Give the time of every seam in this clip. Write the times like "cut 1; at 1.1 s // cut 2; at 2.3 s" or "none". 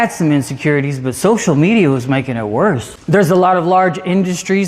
cut 1; at 2.9 s

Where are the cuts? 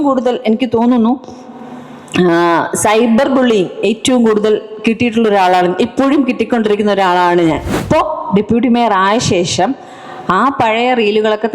cut 1; at 7.8 s

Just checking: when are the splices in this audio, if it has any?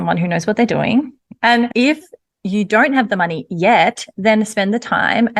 cut 1; at 1.4 s

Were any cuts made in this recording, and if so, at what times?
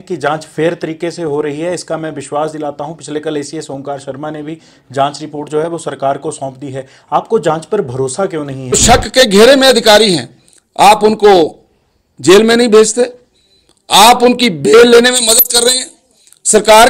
cut 1; at 8.8 s

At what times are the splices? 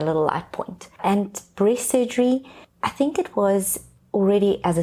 none

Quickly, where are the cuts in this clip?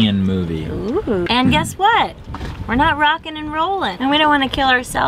cut 1; at 1.3 s // cut 2; at 3.9 s

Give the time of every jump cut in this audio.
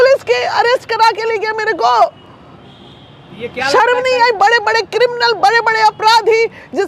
none

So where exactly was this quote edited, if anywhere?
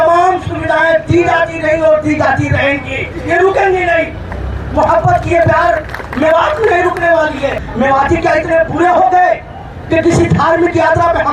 cut 1; at 7.6 s

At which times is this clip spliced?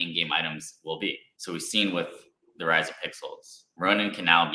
cut 1; at 1.3 s

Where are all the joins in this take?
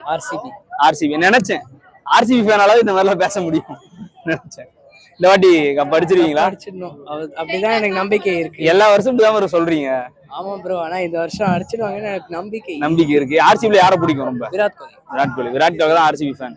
none

